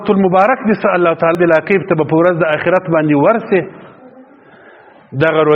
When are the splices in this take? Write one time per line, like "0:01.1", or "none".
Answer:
0:01.4

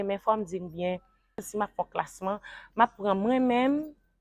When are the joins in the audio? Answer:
0:01.5

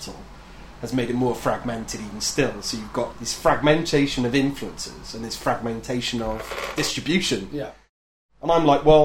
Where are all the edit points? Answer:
0:08.0

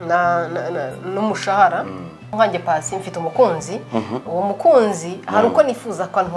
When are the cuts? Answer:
0:02.3

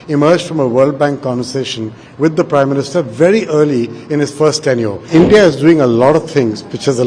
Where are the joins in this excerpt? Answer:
0:05.0

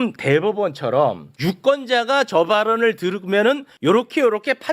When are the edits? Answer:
0:01.3
0:03.7

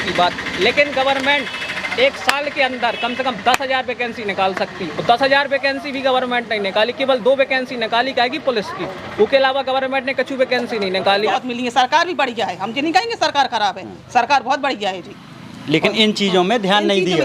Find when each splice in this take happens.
0:11.4

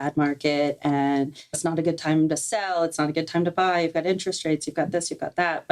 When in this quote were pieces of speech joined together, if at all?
0:01.4

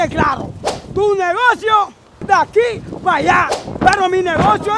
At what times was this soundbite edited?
none

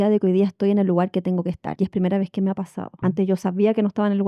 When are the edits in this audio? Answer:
0:01.6
0:02.8

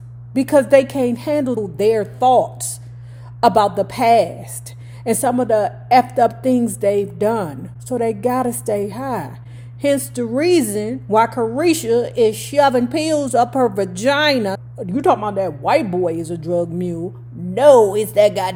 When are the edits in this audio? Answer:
none

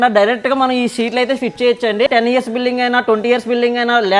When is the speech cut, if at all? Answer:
0:02.1

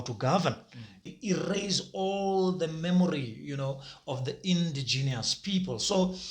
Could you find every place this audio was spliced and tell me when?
0:01.0

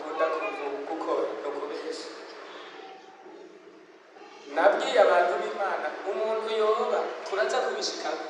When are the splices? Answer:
none

